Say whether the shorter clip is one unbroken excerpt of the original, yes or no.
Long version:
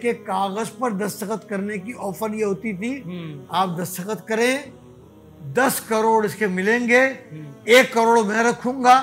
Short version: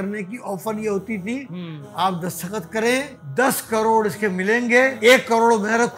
no